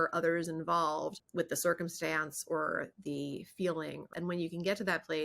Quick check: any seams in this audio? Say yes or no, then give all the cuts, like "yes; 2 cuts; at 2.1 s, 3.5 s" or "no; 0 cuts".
yes; 2 cuts; at 1.2 s, 4.0 s